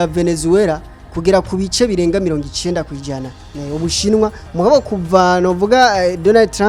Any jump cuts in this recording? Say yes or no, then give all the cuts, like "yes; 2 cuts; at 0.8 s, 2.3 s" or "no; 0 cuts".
no; 0 cuts